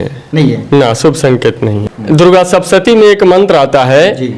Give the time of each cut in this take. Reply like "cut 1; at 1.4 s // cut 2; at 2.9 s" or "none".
cut 1; at 1.8 s